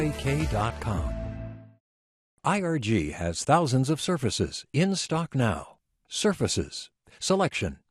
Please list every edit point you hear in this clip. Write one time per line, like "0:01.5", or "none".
none